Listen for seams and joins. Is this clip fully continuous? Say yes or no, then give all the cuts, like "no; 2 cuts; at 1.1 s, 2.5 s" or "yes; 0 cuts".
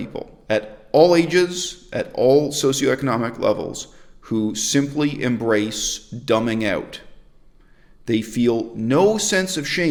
yes; 0 cuts